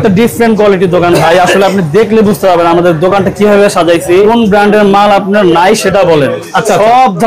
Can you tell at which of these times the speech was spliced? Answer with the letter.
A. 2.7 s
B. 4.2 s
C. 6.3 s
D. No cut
B